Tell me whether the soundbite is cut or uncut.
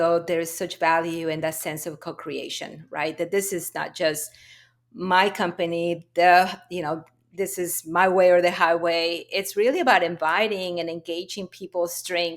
uncut